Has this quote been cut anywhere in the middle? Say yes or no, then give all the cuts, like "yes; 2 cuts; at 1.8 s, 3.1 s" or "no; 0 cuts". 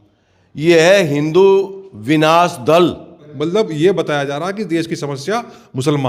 yes; 1 cut; at 3.3 s